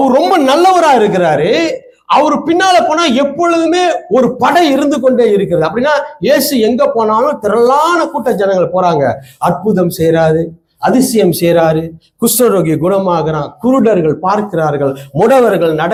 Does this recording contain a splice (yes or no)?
no